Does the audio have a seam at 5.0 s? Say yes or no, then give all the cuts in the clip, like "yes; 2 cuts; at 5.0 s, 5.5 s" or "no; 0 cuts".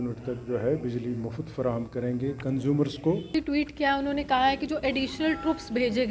no; 1 cut; at 3.3 s